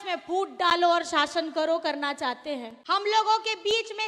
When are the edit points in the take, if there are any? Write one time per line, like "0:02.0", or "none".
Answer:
0:02.7